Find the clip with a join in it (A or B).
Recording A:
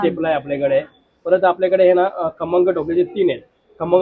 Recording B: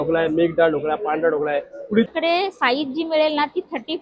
B